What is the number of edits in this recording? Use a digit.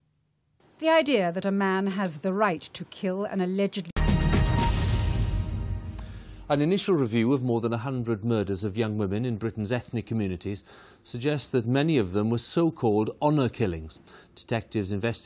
0